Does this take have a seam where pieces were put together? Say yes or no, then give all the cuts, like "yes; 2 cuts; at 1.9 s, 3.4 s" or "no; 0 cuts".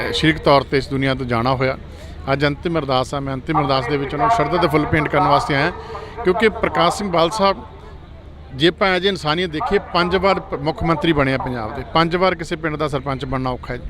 no; 0 cuts